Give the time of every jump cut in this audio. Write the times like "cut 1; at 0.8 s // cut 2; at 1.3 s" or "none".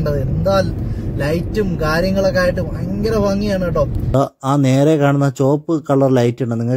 cut 1; at 4.1 s